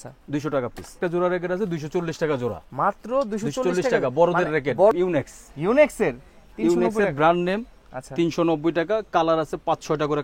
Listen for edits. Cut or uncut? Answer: cut